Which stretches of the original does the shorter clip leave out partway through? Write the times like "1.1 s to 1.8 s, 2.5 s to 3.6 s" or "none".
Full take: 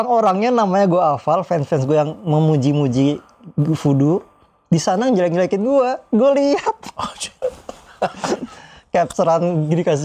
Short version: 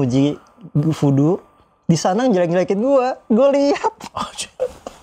none